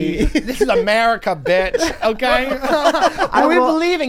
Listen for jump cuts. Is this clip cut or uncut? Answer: uncut